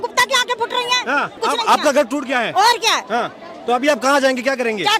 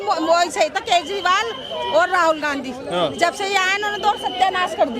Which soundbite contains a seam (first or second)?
first